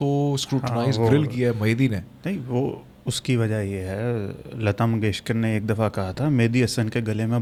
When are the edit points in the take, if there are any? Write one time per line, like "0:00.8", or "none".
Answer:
none